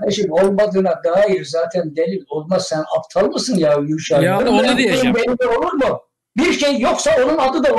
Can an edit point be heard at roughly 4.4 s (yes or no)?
yes